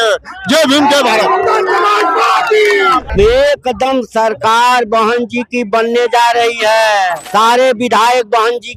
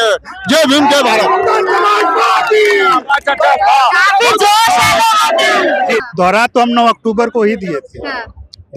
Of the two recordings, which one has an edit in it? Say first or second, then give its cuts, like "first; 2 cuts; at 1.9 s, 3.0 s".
first; 2 cuts; at 3.1 s, 7.2 s